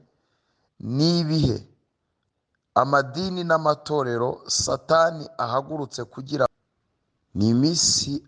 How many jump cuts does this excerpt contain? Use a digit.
1